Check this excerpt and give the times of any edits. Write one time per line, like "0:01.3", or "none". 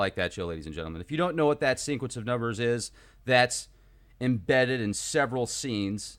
0:03.4